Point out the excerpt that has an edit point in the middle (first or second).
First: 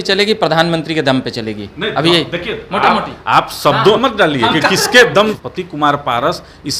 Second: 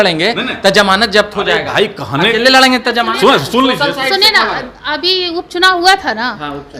first